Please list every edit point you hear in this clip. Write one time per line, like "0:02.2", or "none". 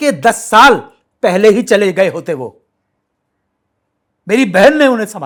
none